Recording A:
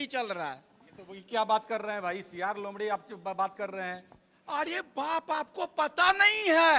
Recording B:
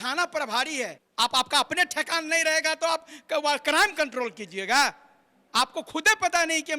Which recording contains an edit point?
B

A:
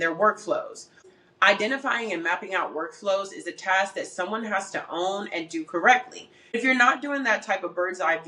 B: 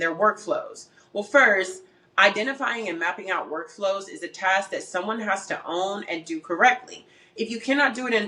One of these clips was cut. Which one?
A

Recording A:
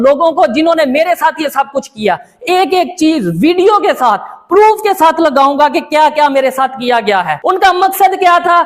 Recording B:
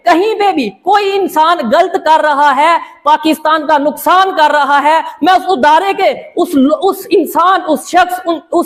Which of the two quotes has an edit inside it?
A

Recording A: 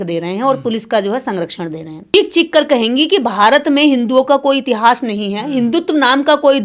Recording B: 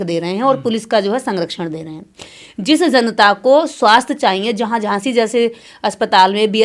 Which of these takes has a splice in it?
A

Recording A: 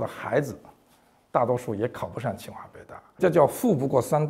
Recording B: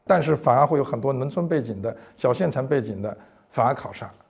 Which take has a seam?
A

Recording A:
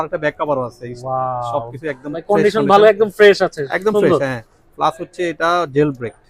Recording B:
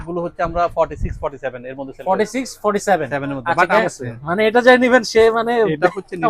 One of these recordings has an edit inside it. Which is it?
B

